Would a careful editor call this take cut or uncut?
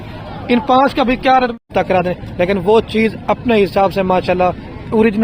cut